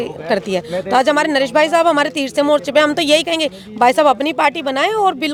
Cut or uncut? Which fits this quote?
uncut